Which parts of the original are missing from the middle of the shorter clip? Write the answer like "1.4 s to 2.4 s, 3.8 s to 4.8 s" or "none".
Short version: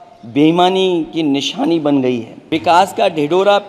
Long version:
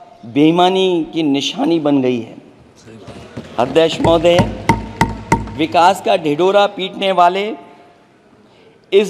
2.4 s to 5.5 s